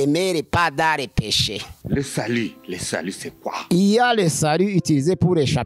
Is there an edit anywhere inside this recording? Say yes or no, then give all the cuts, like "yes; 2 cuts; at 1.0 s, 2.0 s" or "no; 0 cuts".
yes; 2 cuts; at 1.8 s, 3.5 s